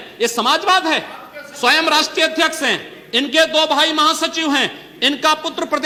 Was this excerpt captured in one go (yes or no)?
yes